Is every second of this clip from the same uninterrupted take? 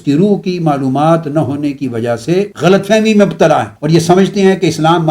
no; 2 cuts; at 2.5 s, 3.7 s

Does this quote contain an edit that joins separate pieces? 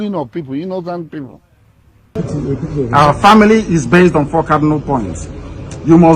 yes; 1 cut; at 2.2 s

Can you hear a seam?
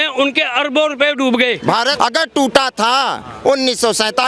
yes; 1 cut; at 1.9 s

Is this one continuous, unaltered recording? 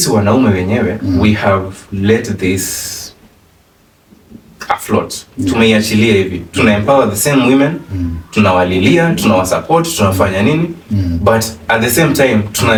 yes; 0 cuts

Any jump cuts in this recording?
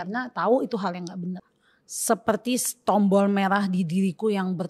yes; 1 cut; at 1.4 s

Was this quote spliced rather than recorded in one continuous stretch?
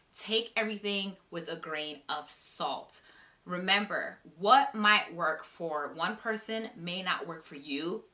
no; 0 cuts

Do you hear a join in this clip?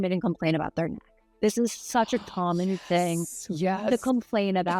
no; 0 cuts

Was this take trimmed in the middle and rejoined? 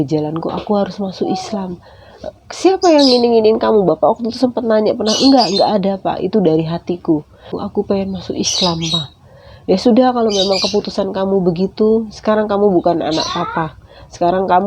yes; 1 cut; at 7.5 s

